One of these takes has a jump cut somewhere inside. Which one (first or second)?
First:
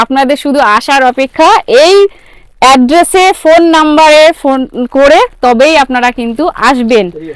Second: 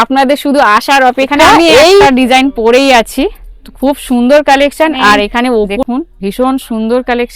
second